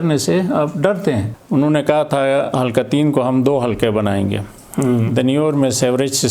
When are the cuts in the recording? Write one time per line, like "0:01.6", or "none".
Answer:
0:01.3